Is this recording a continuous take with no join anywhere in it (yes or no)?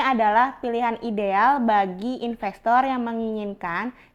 yes